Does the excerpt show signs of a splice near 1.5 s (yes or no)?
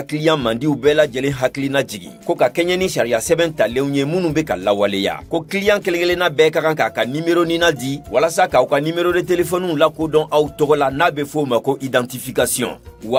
no